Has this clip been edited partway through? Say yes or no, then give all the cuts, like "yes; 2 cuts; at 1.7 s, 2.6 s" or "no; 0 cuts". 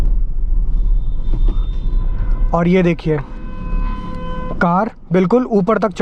no; 0 cuts